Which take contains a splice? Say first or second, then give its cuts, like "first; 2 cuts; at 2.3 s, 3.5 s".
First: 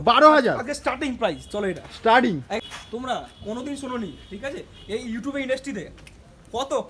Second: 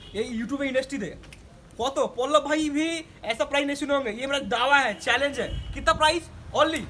first; 1 cut; at 2.6 s